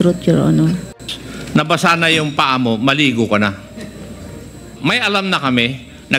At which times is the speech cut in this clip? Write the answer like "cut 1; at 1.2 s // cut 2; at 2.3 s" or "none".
cut 1; at 1.1 s // cut 2; at 4.7 s